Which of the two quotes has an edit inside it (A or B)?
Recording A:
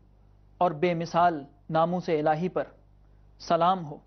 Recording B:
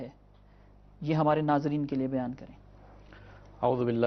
A